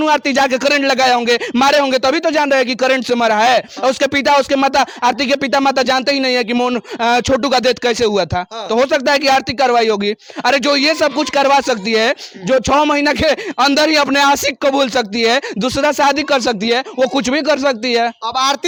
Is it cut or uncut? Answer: uncut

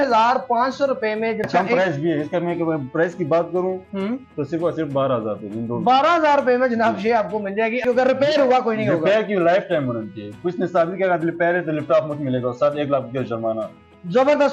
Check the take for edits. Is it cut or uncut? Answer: cut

